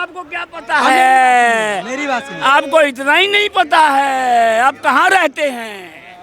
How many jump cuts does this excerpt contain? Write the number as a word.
zero